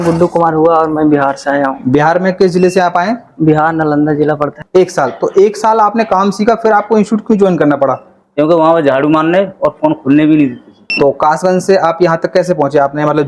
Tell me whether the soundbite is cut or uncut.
cut